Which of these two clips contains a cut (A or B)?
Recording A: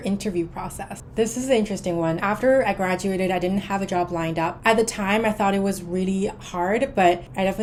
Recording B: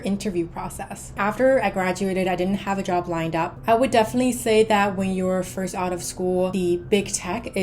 B